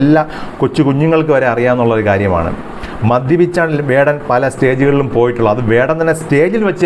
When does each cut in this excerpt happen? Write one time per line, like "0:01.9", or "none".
none

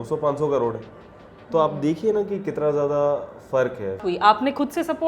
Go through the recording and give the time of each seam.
0:04.0

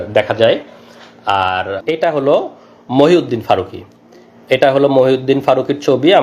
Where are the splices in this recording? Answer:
0:01.8

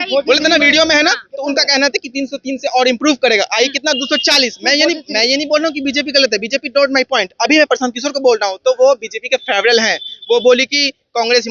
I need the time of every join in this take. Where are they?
none

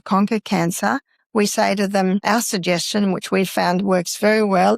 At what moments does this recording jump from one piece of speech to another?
0:01.1
0:02.2

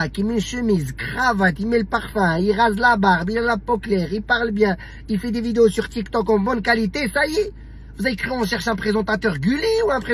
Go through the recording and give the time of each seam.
none

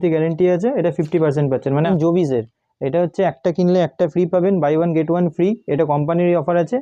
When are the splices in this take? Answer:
0:01.9

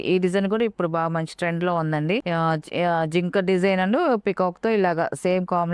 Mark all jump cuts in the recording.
0:02.2

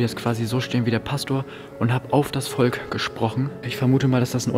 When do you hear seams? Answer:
0:03.6

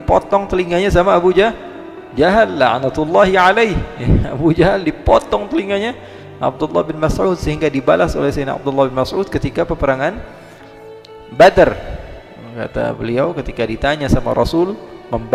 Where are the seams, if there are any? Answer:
none

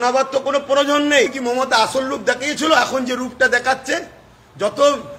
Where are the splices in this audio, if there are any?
0:01.4

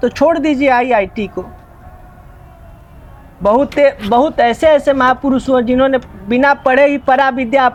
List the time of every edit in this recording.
none

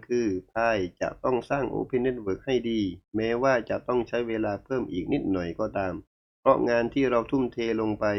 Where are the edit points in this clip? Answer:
none

